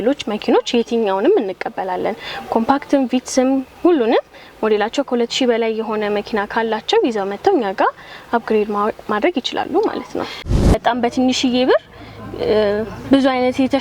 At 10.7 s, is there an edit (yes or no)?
yes